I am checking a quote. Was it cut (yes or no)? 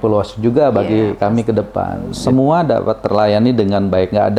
yes